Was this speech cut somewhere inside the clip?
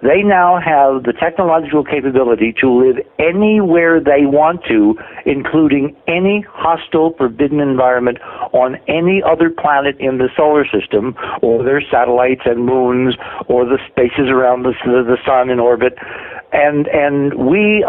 yes; 1 cut; at 14.8 s

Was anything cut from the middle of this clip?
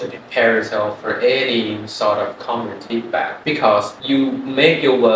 yes; 2 cuts; at 2.9 s, 3.9 s

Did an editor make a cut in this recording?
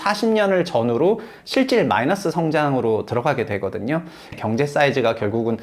yes; 1 cut; at 4.3 s

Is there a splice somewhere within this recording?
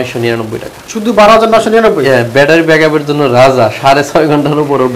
no; 0 cuts

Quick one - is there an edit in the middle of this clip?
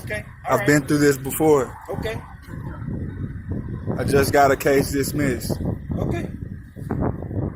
no; 0 cuts

